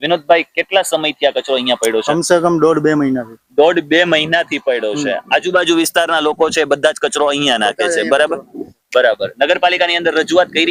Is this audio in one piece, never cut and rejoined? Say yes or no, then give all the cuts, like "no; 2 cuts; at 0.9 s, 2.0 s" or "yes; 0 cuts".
yes; 0 cuts